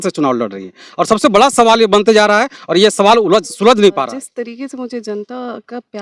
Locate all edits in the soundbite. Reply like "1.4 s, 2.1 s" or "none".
4.0 s